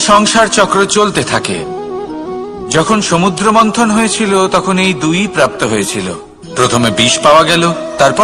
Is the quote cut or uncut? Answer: uncut